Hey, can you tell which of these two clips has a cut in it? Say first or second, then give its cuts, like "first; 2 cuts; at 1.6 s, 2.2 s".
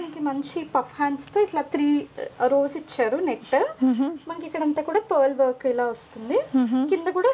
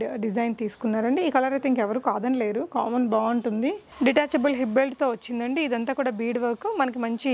second; 1 cut; at 3.9 s